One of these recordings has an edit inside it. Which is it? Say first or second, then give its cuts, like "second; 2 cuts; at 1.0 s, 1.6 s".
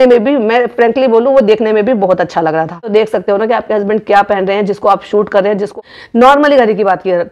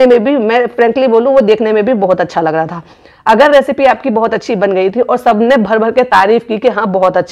first; 2 cuts; at 2.9 s, 5.7 s